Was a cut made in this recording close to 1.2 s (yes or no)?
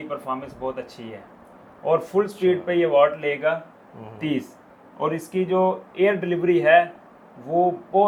no